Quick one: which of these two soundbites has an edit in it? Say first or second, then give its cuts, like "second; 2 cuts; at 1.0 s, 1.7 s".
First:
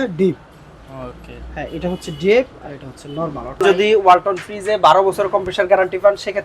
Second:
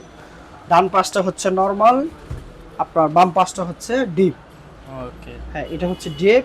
first; 1 cut; at 3.6 s